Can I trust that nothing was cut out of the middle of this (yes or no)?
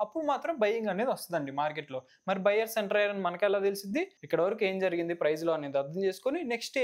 no